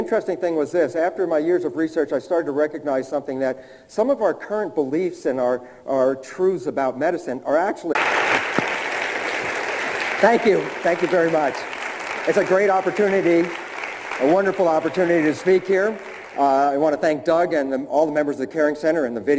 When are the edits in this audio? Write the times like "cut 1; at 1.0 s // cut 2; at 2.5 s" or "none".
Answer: none